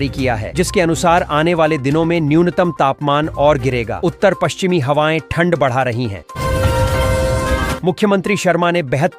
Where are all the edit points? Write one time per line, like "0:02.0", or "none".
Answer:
0:06.3
0:07.8